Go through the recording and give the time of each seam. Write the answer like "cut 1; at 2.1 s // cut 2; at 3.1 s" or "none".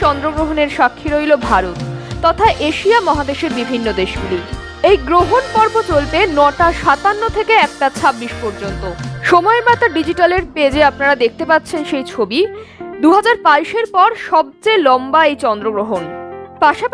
cut 1; at 9.1 s